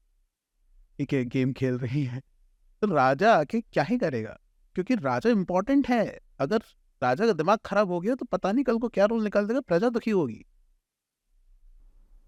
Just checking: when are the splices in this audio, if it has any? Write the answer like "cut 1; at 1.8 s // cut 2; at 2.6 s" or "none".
none

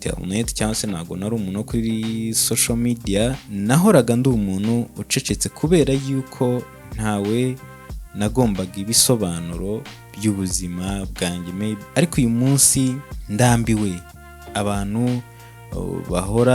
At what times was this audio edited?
cut 1; at 3.4 s // cut 2; at 11.8 s // cut 3; at 13.1 s

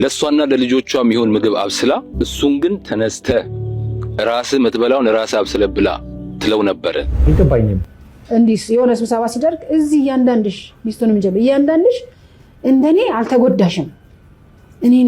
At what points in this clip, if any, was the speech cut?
cut 1; at 2.1 s // cut 2; at 7.2 s

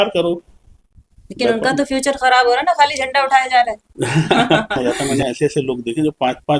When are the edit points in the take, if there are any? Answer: cut 1; at 4.8 s

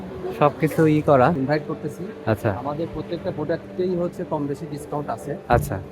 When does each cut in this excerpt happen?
cut 1; at 1.4 s

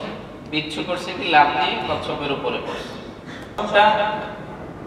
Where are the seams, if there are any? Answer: cut 1; at 3.6 s

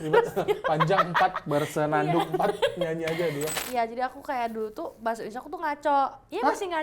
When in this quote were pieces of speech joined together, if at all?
cut 1; at 3.5 s

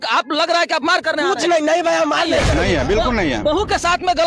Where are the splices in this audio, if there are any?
cut 1; at 2.5 s

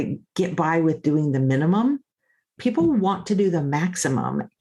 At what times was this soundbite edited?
cut 1; at 2.5 s

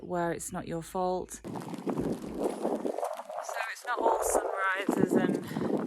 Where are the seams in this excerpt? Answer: cut 1; at 1.5 s

